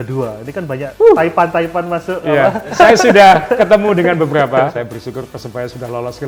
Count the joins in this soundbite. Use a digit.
3